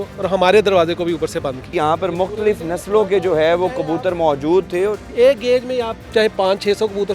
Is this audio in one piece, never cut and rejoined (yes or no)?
no